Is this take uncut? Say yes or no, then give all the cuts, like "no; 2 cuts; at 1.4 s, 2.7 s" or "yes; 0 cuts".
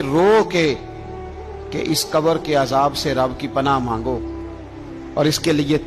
yes; 0 cuts